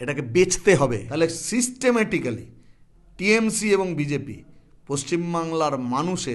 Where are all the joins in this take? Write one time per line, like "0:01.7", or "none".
0:01.0